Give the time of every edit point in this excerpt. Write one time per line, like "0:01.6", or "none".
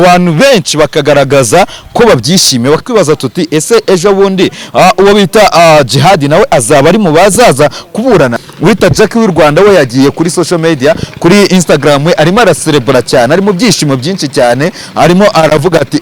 0:02.8
0:08.3